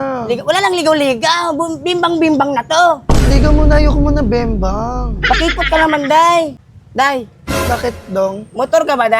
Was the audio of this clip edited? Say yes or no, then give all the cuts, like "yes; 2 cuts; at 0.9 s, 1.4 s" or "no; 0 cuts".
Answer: yes; 1 cut; at 6.6 s